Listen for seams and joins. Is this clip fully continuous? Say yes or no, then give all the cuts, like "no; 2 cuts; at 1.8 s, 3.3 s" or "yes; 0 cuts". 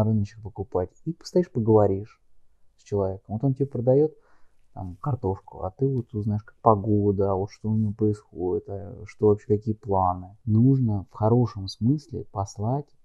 no; 1 cut; at 10.3 s